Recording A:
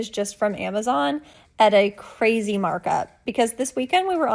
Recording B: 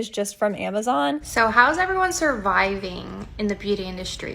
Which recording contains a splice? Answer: B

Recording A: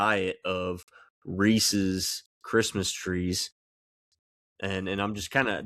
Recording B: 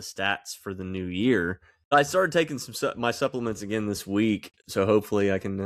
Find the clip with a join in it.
B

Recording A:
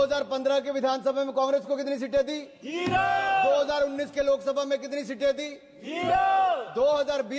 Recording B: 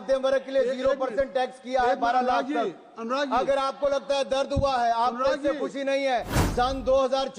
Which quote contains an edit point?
B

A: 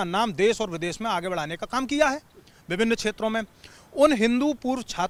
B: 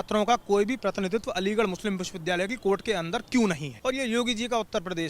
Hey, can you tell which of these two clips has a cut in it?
B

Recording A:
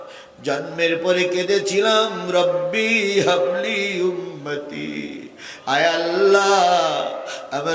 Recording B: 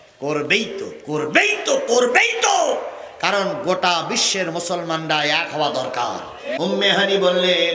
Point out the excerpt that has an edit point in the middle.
B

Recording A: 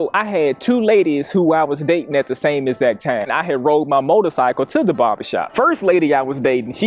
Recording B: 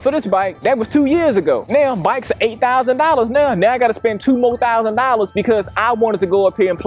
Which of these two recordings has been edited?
A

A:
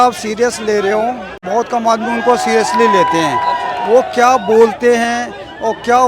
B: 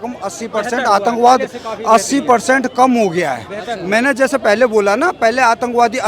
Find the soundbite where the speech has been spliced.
A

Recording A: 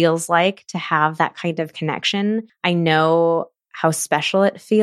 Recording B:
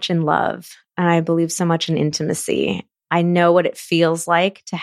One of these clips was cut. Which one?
A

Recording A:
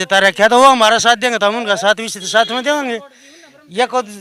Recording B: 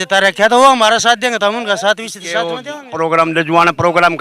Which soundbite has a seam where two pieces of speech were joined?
B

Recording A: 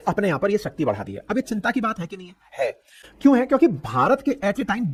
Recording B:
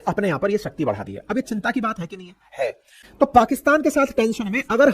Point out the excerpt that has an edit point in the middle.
B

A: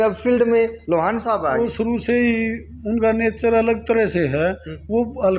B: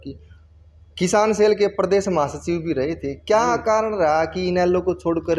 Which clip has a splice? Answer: A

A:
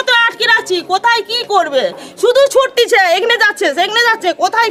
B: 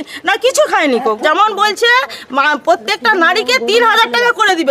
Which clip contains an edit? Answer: B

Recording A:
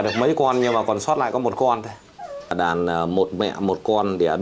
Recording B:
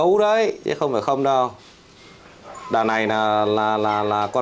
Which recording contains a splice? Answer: A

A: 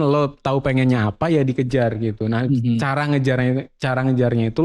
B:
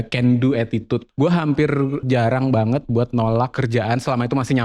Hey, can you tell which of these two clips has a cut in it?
B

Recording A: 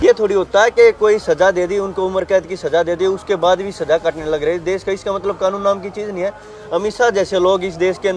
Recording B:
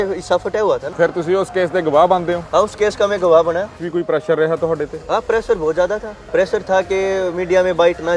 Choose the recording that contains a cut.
B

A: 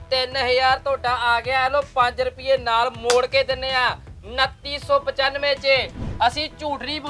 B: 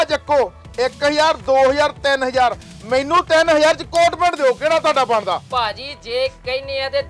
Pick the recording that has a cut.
A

